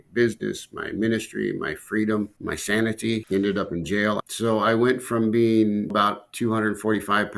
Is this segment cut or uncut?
cut